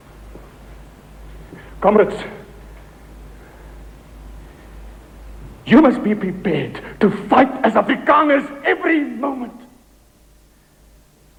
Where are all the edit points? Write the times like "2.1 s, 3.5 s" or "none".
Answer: none